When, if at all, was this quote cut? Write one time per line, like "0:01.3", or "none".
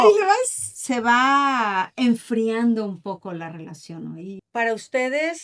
0:04.4